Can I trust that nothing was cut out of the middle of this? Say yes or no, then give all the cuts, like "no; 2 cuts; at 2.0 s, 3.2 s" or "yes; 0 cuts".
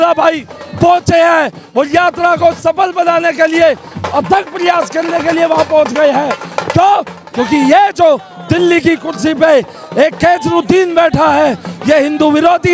yes; 0 cuts